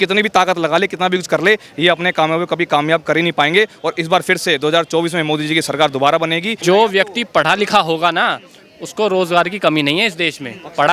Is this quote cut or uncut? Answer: cut